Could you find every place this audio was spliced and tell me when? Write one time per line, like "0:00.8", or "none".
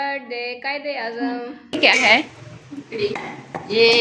0:01.7